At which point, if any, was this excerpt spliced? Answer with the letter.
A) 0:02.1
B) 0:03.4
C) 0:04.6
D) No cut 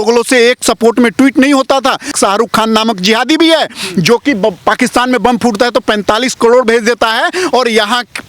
A